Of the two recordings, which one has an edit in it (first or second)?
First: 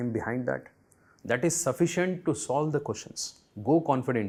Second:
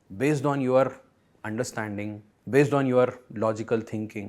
second